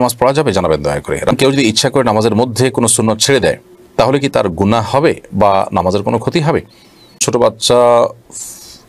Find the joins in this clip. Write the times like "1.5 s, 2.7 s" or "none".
1.3 s, 7.2 s